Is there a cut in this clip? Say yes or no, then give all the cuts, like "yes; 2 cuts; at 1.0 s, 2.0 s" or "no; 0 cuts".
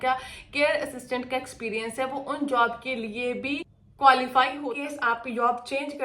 yes; 2 cuts; at 3.8 s, 4.6 s